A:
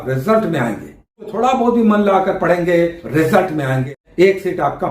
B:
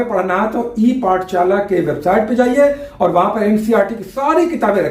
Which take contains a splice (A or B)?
A